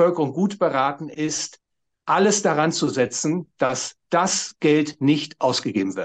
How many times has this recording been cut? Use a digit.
0